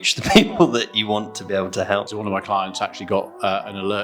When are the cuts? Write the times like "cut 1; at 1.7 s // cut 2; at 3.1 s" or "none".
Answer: cut 1; at 2.1 s